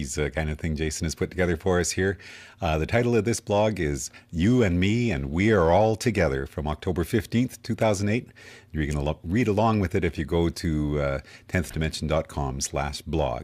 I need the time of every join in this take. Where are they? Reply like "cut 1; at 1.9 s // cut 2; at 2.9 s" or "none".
none